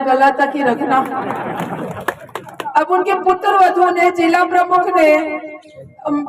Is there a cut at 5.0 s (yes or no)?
no